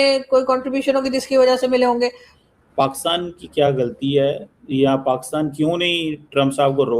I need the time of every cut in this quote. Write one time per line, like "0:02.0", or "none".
0:02.3

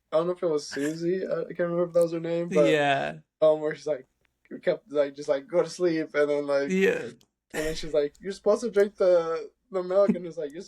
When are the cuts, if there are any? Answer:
0:03.2

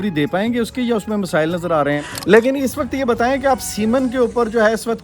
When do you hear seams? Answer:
0:02.0

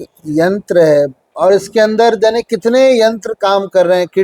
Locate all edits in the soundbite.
none

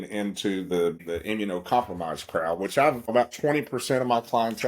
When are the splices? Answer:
0:01.0
0:03.1

